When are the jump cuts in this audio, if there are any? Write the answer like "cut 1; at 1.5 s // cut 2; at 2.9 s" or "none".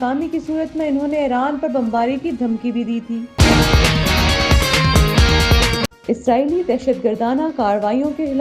cut 1; at 3.3 s // cut 2; at 5.9 s